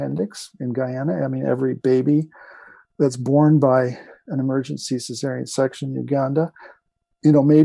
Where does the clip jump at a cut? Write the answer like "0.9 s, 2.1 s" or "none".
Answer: none